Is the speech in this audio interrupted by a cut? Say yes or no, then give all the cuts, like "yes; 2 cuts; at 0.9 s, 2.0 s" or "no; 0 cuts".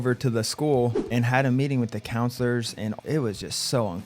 yes; 2 cuts; at 1.0 s, 3.0 s